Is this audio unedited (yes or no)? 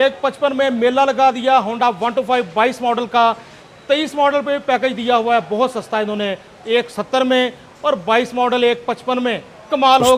yes